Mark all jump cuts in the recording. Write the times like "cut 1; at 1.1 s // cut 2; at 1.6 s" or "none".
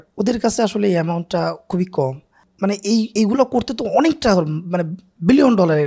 cut 1; at 2.4 s